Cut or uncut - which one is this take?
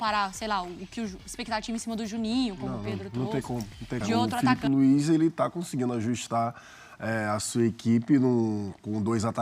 cut